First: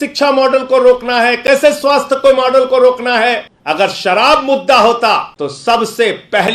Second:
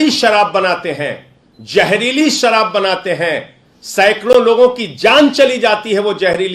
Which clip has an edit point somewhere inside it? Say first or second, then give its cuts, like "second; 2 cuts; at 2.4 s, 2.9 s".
first; 2 cuts; at 3.5 s, 5.3 s